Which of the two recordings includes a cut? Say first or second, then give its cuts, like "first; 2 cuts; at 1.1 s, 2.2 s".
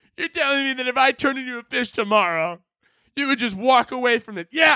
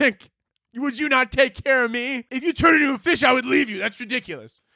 second; 1 cut; at 2.2 s